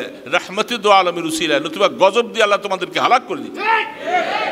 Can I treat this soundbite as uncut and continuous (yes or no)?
yes